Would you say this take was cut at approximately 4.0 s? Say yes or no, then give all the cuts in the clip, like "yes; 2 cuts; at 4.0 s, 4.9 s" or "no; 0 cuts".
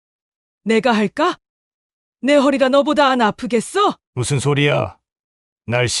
yes; 1 cut; at 4.0 s